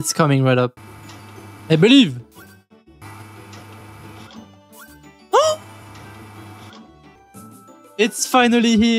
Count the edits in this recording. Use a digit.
1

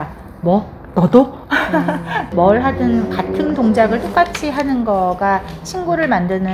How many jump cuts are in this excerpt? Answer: 1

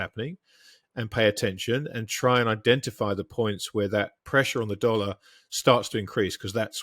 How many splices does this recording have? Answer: 1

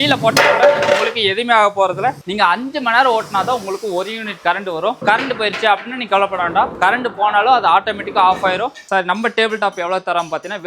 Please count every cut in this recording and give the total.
3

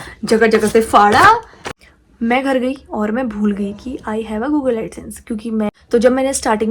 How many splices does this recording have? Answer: 2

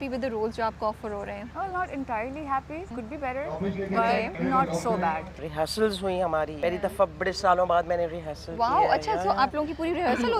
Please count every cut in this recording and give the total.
5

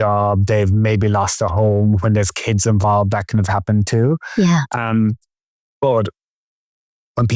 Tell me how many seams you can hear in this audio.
0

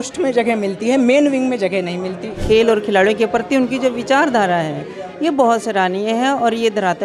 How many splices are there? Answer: 1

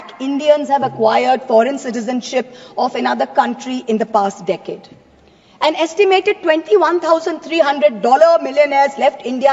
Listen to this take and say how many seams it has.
0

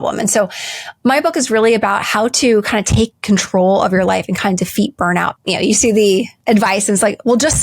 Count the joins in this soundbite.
2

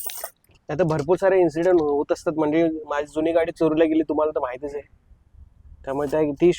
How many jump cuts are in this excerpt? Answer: 0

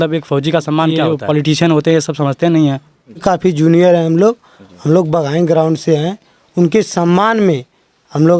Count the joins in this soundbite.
2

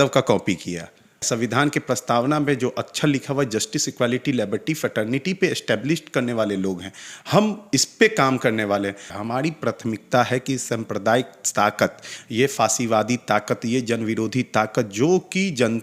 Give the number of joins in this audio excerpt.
2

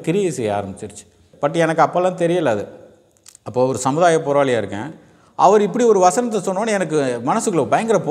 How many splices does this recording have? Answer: 1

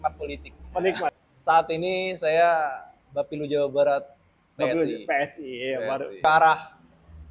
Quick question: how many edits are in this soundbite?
2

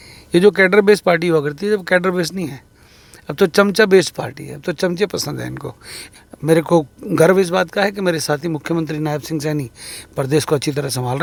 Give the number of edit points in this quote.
0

